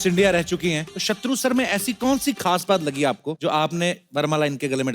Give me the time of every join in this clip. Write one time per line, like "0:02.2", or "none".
0:00.9
0:03.3